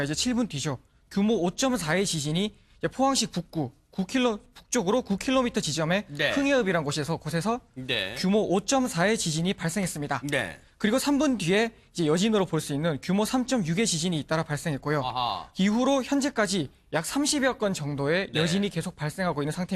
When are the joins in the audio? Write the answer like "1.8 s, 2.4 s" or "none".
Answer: 10.5 s